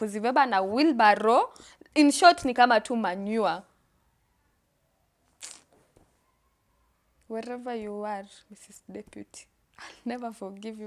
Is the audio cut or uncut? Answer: uncut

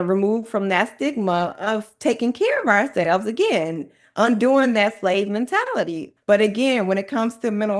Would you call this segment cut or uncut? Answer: cut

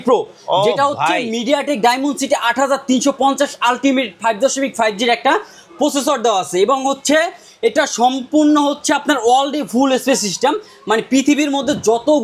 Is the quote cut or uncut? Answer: uncut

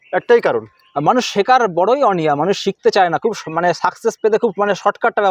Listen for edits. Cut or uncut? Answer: uncut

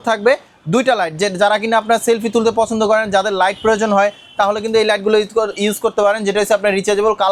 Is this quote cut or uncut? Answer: uncut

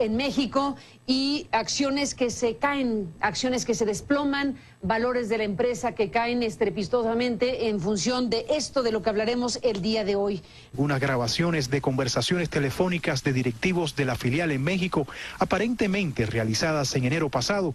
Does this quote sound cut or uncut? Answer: uncut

